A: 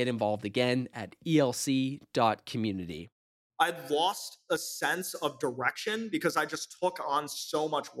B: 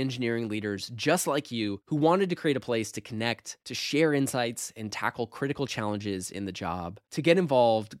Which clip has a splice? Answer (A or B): A